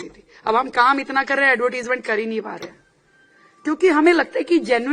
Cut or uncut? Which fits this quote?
uncut